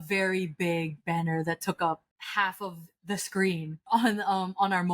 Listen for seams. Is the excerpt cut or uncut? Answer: cut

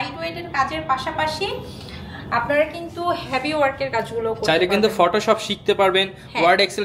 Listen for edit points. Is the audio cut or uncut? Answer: uncut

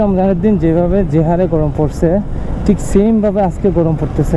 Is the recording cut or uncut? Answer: uncut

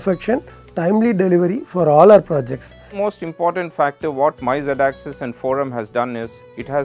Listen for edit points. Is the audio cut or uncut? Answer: cut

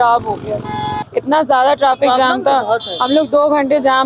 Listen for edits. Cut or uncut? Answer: cut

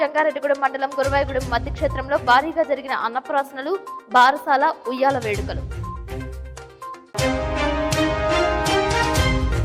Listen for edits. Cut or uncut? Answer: uncut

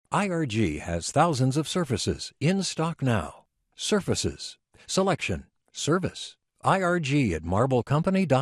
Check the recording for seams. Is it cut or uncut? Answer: uncut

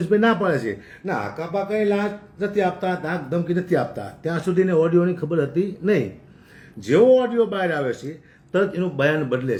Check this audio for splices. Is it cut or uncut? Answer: uncut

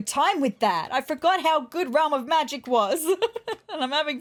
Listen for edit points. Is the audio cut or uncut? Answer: uncut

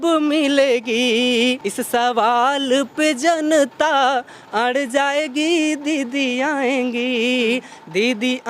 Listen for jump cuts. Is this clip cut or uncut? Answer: cut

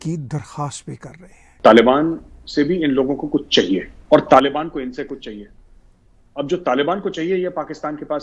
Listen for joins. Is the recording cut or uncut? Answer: cut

